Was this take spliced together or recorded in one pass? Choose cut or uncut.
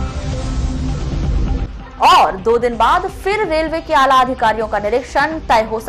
cut